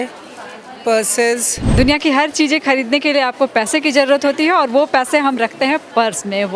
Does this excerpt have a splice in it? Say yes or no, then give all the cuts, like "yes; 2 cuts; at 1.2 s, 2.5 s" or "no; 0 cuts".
yes; 1 cut; at 1.6 s